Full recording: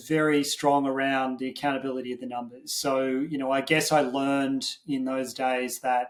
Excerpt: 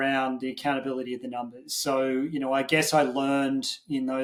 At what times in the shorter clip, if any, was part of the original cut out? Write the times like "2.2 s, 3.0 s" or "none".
none